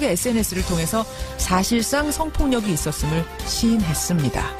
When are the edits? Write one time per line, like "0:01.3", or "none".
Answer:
0:02.0